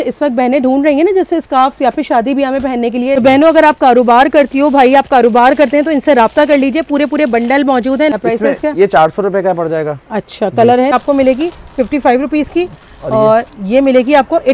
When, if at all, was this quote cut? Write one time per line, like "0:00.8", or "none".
0:03.2
0:08.1
0:10.9